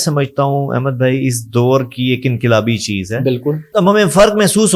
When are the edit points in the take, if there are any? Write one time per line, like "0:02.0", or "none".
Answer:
0:03.7